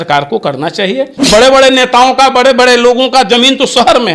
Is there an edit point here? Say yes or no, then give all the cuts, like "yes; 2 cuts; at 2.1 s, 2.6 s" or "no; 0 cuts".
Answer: yes; 1 cut; at 1.2 s